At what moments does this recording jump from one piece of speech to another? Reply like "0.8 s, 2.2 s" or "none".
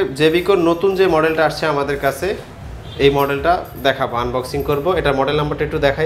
none